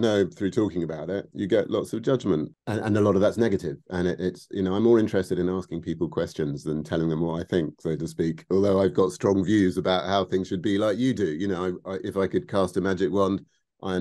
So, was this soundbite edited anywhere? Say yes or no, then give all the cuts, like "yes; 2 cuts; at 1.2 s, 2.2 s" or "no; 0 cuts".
yes; 1 cut; at 2.5 s